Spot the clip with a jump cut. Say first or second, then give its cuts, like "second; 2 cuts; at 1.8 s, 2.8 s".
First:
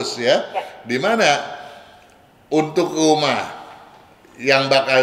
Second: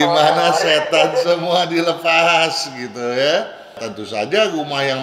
second; 1 cut; at 3.8 s